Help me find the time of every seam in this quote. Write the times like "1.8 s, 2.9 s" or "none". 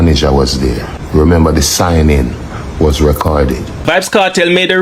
3.8 s